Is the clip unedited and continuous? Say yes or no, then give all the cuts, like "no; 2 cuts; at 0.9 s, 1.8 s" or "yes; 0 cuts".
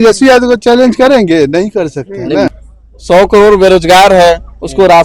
no; 1 cut; at 2.5 s